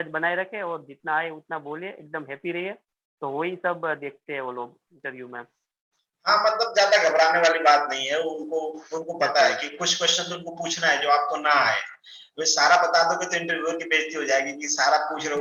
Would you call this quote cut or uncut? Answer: uncut